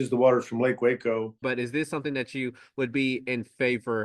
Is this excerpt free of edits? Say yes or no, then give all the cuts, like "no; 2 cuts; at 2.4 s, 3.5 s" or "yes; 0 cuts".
no; 1 cut; at 1.4 s